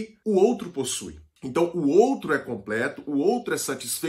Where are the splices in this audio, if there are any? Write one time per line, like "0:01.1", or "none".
none